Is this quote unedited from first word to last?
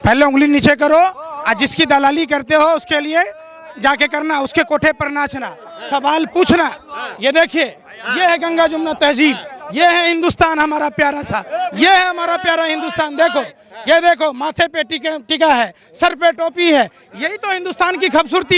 yes; 0 cuts

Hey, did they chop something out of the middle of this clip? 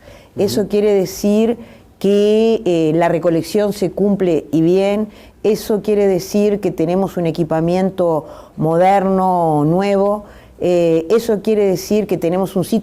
yes; 1 cut; at 8.8 s

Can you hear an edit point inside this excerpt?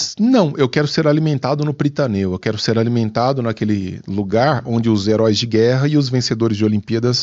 no; 0 cuts

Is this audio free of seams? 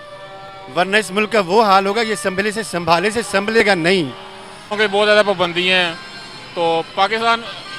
no; 1 cut; at 4.8 s

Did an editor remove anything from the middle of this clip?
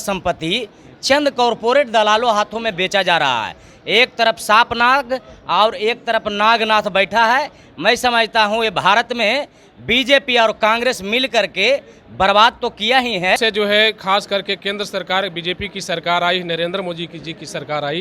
yes; 1 cut; at 13.4 s

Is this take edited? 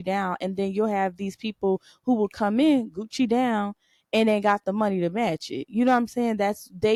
no; 0 cuts

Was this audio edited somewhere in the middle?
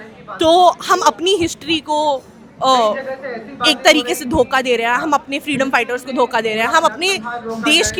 no; 0 cuts

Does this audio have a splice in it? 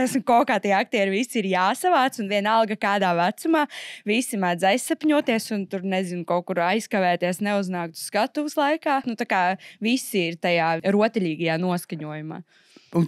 yes; 2 cuts; at 9.1 s, 10.8 s

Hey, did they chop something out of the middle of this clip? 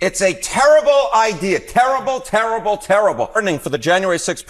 yes; 1 cut; at 3.4 s

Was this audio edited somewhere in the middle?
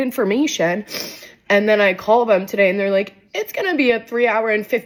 no; 0 cuts

